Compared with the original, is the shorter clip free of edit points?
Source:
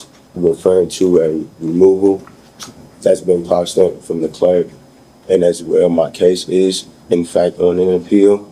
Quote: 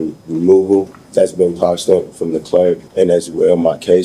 no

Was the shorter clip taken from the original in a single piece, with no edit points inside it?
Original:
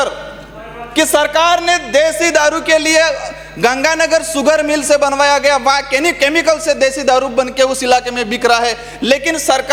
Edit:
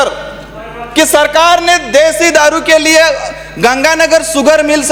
yes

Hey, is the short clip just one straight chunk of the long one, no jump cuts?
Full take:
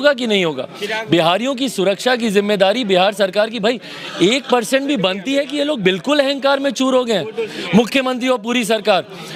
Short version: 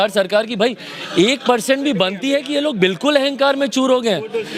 yes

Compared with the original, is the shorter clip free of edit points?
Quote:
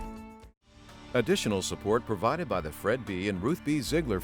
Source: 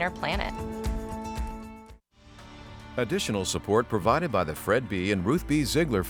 no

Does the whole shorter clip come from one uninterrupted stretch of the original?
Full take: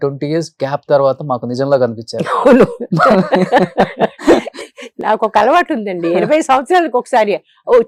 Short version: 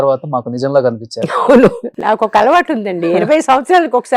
no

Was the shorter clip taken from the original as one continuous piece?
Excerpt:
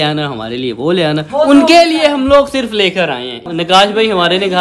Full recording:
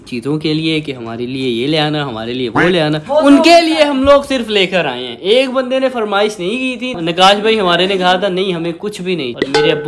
no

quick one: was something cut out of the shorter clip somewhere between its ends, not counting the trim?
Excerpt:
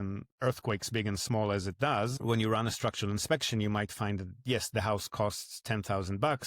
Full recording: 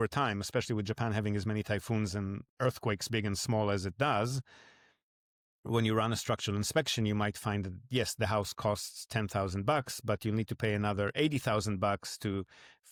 yes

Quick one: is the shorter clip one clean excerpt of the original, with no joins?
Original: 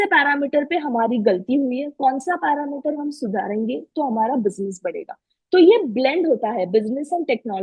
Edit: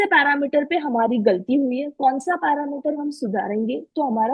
yes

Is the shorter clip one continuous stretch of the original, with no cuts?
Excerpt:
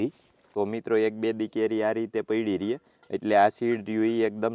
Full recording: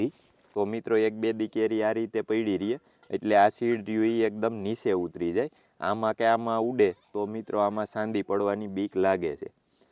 yes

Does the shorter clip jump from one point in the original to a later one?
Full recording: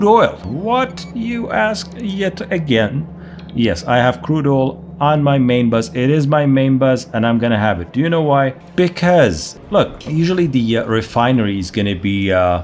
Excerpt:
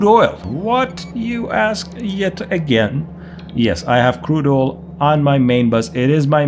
no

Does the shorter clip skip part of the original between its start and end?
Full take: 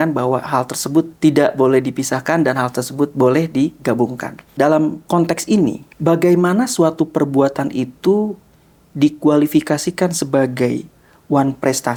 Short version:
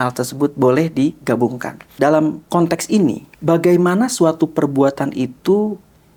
no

